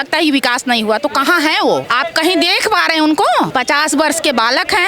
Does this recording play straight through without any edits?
no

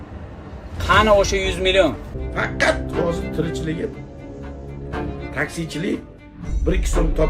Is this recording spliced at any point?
yes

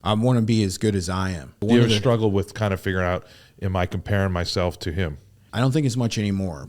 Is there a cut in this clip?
yes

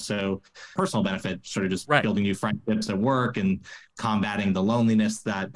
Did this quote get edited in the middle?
no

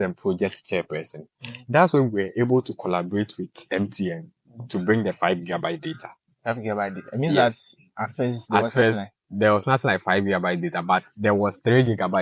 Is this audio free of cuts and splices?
yes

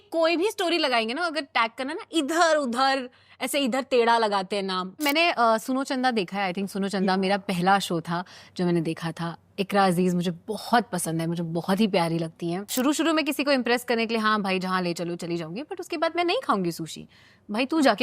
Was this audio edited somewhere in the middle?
yes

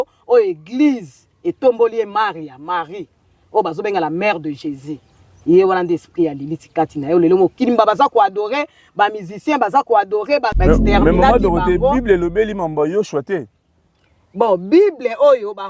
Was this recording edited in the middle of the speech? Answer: yes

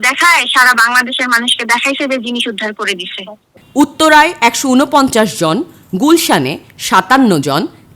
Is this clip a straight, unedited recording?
no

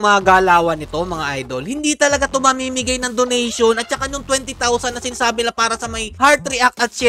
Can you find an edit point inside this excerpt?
no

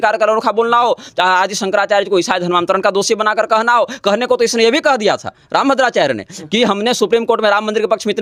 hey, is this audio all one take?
yes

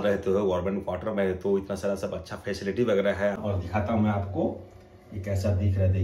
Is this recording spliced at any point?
yes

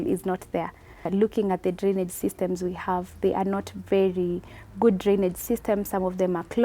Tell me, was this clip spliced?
yes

